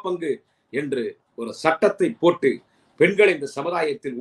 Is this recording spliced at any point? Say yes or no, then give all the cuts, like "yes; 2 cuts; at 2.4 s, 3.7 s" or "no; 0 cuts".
no; 0 cuts